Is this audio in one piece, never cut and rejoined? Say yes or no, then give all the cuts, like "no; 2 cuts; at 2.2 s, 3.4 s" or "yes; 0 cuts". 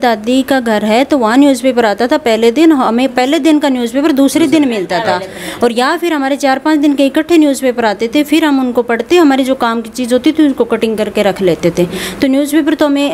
yes; 0 cuts